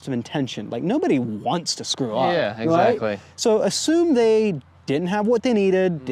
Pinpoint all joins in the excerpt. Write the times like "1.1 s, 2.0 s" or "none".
none